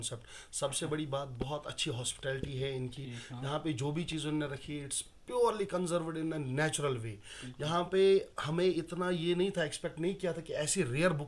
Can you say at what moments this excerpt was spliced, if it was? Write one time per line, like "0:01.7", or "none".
none